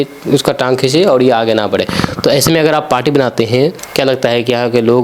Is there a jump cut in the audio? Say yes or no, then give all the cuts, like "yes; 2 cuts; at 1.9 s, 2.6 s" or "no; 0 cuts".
yes; 1 cut; at 3.8 s